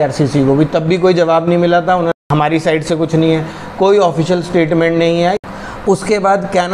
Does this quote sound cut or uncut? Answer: cut